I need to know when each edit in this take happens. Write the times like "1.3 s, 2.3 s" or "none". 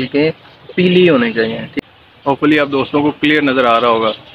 1.7 s